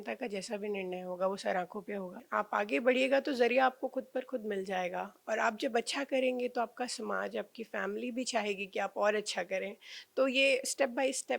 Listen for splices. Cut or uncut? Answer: cut